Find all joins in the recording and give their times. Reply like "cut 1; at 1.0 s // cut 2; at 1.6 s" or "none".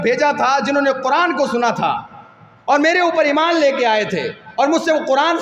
none